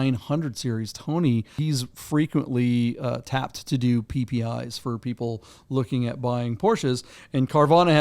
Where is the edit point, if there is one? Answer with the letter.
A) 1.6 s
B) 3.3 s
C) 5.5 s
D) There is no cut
A